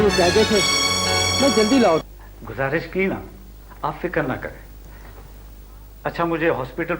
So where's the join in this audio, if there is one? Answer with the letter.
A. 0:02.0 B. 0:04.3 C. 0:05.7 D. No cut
A